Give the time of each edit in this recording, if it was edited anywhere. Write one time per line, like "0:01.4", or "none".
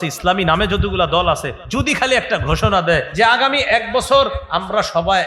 0:01.6
0:03.1